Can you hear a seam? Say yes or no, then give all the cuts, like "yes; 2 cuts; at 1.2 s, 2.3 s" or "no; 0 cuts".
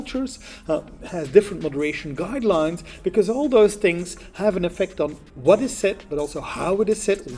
no; 0 cuts